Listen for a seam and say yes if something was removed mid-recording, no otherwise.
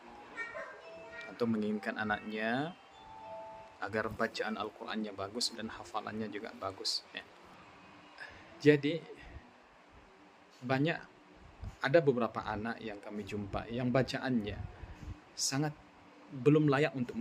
yes